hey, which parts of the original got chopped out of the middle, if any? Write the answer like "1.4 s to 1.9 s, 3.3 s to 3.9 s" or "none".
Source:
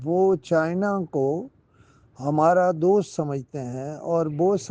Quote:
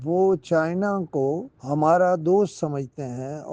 1.5 s to 2.1 s